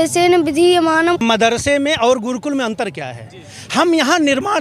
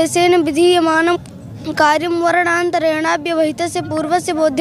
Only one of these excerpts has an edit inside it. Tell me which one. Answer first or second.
first